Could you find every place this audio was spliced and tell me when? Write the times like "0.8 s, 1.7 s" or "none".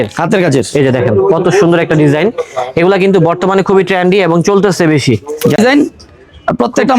5.6 s